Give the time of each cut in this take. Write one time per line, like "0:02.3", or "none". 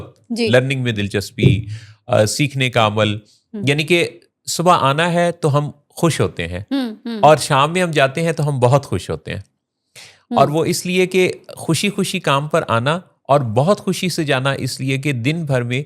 none